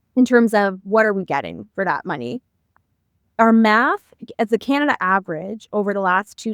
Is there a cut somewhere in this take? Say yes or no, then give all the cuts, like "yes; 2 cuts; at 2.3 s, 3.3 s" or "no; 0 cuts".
yes; 1 cut; at 2.7 s